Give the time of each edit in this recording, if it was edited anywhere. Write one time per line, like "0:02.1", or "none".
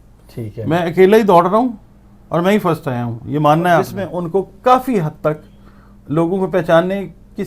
0:04.0